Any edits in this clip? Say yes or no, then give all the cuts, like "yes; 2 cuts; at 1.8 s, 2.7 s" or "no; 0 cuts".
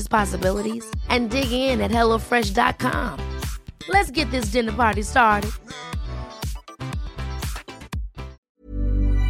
yes; 1 cut; at 8.4 s